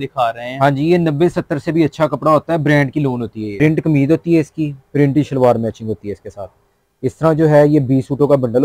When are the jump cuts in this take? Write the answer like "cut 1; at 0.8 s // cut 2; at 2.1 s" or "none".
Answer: cut 1; at 3.4 s